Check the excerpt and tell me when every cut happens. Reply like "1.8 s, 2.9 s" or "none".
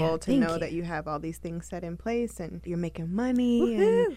2.5 s